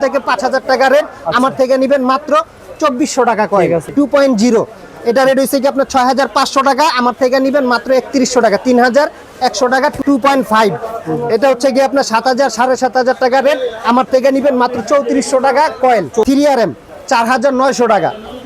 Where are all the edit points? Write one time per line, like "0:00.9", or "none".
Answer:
0:03.9
0:10.0
0:16.2